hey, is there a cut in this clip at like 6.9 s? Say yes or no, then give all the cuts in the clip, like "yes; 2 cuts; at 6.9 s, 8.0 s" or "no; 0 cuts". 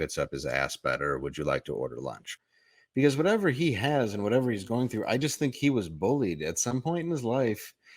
no; 1 cut; at 2.3 s